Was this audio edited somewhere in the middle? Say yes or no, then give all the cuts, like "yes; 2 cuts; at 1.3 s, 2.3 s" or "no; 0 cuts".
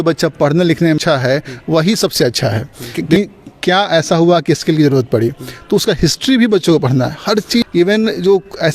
yes; 3 cuts; at 1.0 s, 3.0 s, 7.6 s